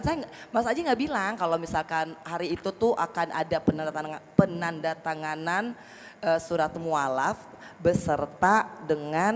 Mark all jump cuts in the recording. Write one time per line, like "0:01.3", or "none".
none